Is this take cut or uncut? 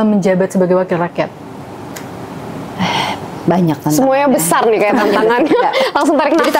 uncut